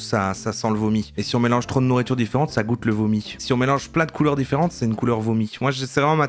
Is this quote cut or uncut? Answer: uncut